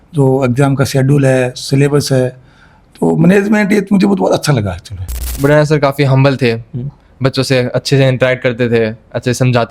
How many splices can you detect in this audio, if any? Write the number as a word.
one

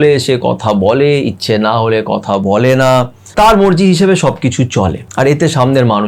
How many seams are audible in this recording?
two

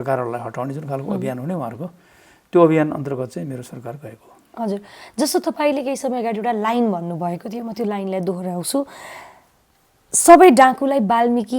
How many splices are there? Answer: zero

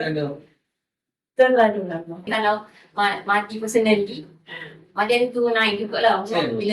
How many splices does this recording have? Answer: one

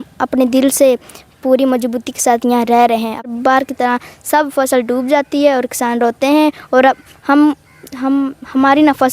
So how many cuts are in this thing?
one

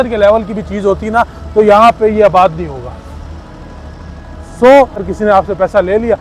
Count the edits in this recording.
one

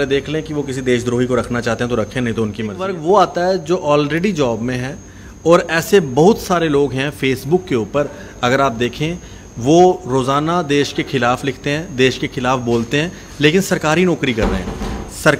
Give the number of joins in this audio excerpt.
one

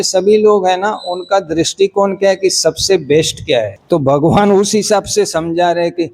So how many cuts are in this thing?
one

